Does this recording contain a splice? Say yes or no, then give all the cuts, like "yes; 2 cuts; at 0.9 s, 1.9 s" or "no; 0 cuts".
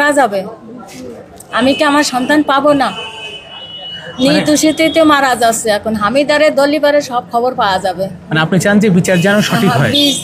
no; 0 cuts